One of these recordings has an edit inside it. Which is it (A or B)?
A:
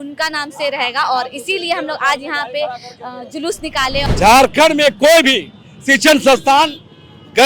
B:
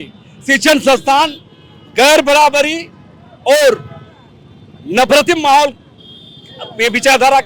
A